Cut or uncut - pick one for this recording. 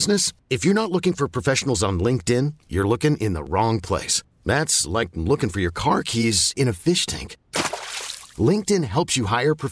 uncut